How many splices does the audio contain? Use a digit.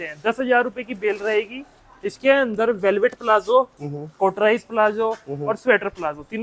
0